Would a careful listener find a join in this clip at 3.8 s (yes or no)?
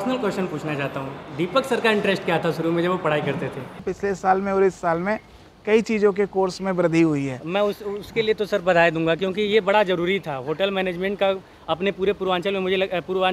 yes